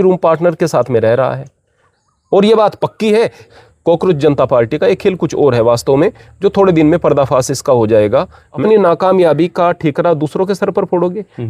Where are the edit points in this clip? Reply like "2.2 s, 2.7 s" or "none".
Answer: 3.5 s, 8.5 s